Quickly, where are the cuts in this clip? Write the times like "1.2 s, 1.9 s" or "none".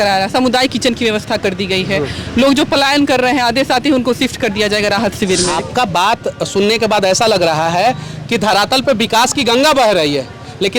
5.5 s